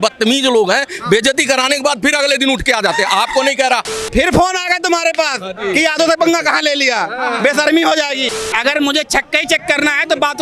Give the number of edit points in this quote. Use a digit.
2